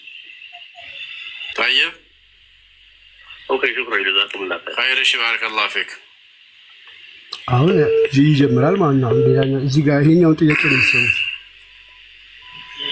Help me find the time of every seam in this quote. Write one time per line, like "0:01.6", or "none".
0:01.4